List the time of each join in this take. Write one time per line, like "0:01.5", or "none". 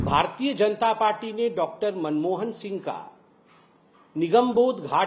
none